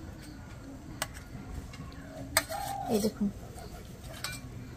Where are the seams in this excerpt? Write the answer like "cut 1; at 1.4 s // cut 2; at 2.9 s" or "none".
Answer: cut 1; at 2.2 s